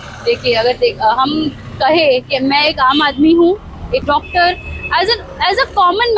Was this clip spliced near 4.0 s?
yes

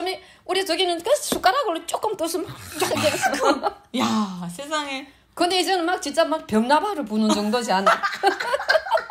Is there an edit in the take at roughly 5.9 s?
no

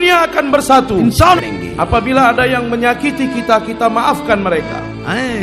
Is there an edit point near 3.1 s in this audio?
no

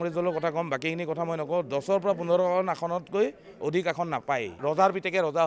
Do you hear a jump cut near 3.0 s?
no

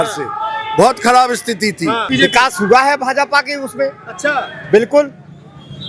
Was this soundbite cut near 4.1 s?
no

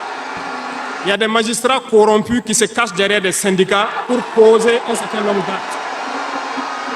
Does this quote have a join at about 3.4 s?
no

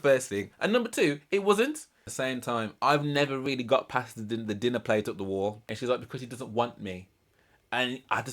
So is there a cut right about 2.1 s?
yes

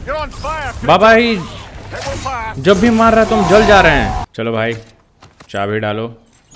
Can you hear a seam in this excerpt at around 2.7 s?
no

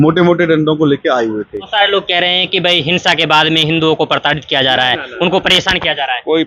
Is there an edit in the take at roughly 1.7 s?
yes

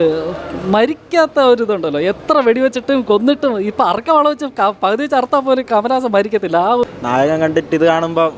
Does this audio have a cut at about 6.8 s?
yes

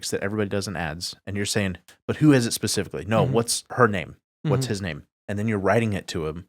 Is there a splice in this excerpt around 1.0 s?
no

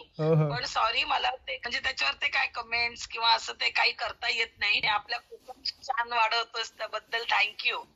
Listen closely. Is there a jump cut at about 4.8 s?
yes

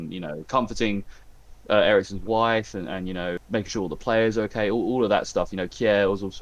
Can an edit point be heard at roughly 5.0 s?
no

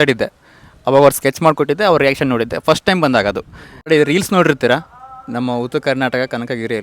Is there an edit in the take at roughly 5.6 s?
no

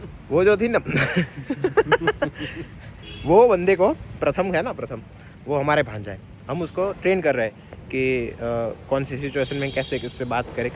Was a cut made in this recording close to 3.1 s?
no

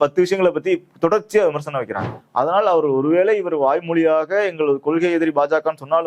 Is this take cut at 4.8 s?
no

